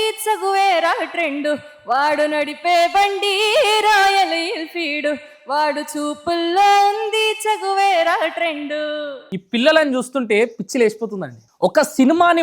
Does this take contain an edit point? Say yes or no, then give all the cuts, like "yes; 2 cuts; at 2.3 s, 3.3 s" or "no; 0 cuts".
yes; 1 cut; at 9.3 s